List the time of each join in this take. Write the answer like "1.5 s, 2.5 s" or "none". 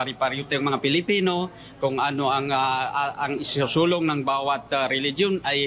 none